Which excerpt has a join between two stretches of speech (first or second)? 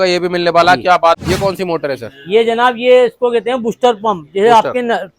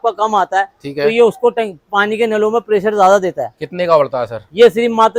first